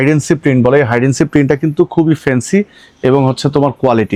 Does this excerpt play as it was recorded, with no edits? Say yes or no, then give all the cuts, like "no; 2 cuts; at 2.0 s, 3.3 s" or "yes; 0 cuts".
yes; 0 cuts